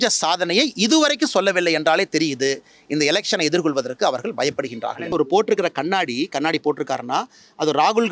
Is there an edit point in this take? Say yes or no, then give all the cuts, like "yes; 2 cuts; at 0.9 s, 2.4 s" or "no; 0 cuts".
yes; 1 cut; at 5.1 s